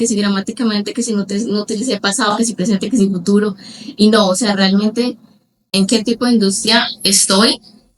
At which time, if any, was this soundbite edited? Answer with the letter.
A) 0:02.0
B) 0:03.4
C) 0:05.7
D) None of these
C